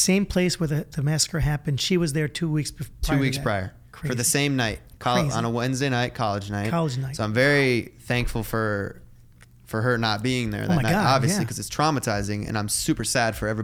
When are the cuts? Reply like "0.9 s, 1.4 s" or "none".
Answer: none